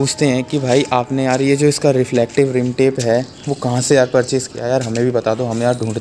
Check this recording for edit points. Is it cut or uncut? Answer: uncut